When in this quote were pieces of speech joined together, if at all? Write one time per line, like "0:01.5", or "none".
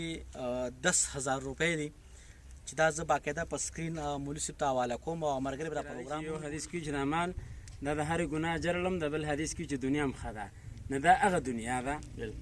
0:06.1